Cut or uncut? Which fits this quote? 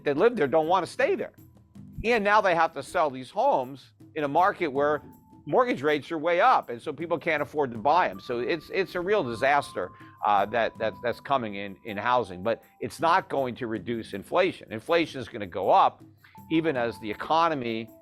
uncut